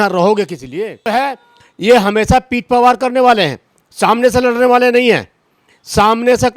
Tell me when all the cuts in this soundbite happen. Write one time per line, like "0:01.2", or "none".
0:01.1